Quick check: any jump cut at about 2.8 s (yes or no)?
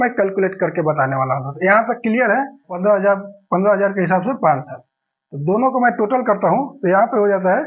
yes